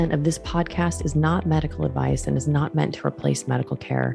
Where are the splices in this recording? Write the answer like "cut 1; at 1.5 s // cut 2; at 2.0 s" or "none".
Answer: none